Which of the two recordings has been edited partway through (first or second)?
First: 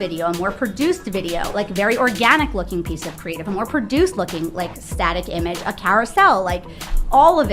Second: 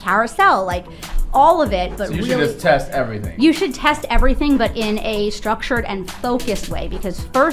first